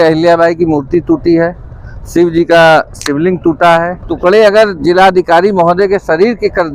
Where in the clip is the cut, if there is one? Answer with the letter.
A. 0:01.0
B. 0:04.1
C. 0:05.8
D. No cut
B